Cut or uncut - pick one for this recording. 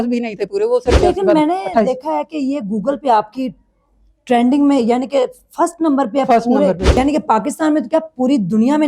cut